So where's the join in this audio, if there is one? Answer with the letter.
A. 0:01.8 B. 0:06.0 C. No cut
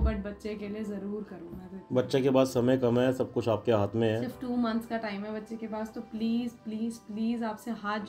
C